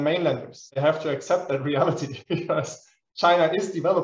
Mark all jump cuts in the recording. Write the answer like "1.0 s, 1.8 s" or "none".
none